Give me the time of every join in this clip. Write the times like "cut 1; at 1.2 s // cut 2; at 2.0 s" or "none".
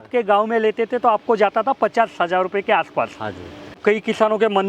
cut 1; at 3.8 s